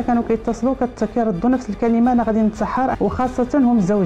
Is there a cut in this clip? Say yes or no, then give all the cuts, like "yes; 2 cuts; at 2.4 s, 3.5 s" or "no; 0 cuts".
yes; 1 cut; at 2.9 s